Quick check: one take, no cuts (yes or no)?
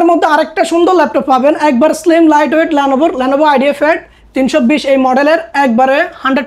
yes